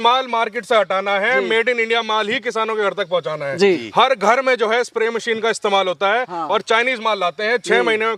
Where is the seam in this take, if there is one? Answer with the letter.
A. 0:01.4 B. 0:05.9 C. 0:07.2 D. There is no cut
D